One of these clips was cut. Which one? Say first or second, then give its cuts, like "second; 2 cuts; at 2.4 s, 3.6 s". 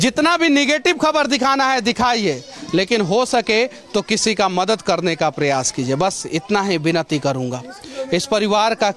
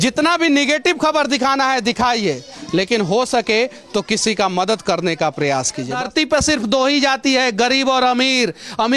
second; 1 cut; at 5.9 s